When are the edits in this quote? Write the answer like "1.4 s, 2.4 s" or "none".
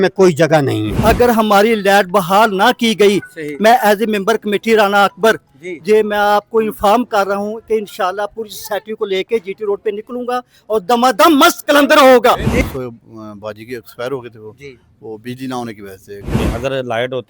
0.9 s, 12.5 s, 16.3 s